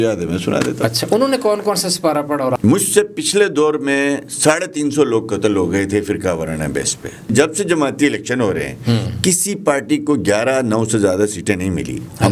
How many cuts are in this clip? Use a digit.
2